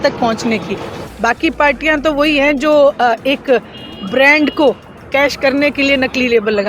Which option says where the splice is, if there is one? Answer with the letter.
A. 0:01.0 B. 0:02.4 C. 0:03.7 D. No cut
A